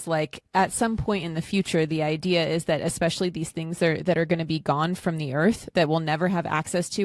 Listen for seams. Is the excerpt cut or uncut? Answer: uncut